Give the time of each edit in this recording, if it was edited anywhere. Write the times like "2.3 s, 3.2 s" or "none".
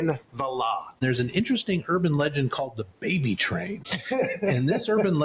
1.0 s, 3.9 s